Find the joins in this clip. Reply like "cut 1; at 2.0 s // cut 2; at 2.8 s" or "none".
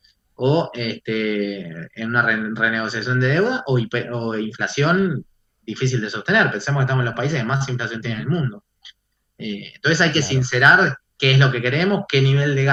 none